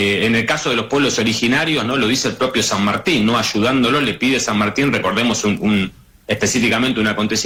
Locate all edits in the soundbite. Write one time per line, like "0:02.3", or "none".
none